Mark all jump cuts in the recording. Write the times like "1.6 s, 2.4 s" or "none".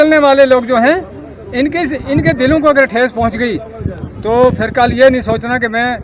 none